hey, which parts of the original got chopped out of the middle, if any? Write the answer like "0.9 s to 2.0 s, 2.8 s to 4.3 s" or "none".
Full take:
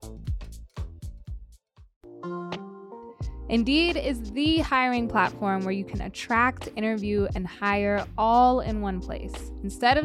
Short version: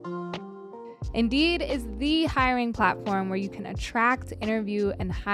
3.2 s to 3.4 s